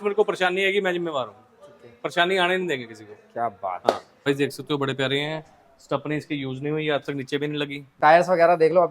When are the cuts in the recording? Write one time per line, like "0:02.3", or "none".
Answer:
0:04.3
0:07.9